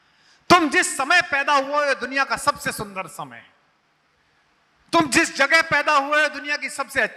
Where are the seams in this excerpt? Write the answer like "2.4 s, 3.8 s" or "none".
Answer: none